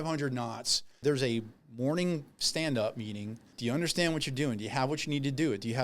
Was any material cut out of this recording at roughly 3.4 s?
yes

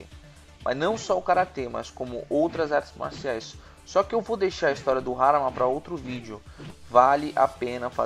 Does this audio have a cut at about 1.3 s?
yes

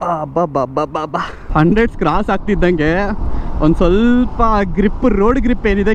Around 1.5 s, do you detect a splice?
yes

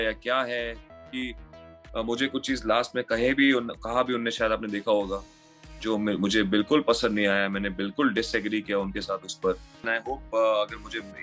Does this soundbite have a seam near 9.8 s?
yes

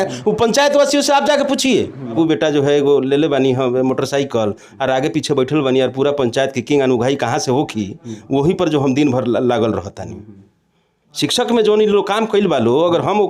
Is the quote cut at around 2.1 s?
yes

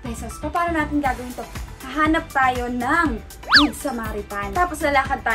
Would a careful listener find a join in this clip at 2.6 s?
no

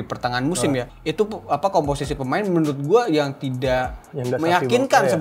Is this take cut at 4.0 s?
no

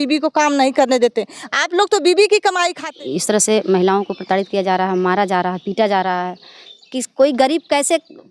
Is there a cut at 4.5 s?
no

